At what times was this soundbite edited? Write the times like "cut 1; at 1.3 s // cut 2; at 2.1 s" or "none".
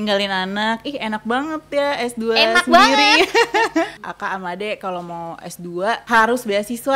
cut 1; at 4.0 s